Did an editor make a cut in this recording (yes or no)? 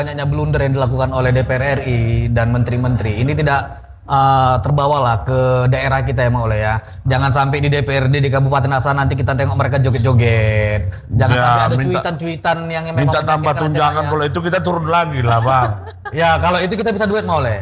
no